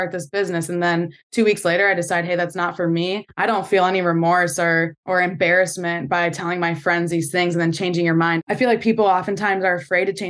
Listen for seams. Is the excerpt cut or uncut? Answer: cut